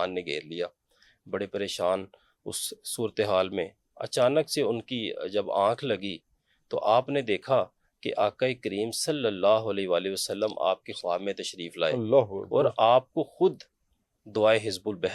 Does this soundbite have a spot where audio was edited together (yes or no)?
no